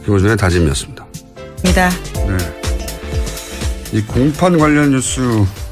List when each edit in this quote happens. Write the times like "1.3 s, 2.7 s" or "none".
1.4 s